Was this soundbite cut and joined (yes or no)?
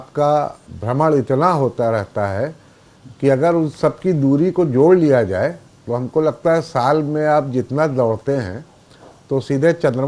no